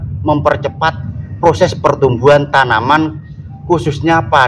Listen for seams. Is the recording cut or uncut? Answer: uncut